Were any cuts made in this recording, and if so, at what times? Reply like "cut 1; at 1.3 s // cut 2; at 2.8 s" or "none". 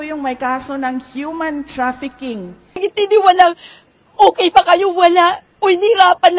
cut 1; at 2.9 s